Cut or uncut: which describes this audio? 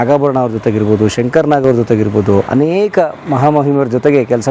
uncut